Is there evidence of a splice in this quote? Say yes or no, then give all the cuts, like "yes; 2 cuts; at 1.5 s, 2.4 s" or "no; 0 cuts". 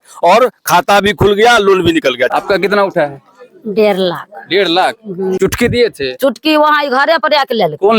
yes; 2 cuts; at 2.3 s, 5.4 s